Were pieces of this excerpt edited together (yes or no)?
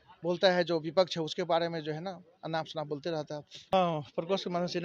yes